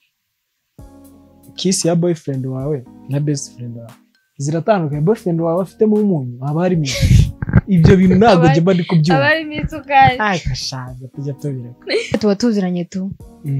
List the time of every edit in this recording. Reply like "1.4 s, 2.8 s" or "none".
12.2 s